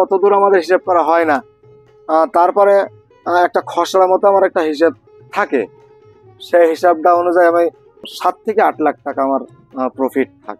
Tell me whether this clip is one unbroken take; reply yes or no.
no